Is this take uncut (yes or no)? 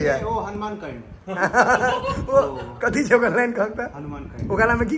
yes